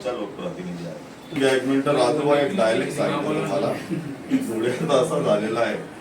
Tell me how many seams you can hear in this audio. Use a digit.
1